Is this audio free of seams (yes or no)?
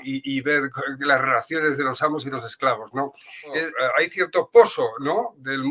no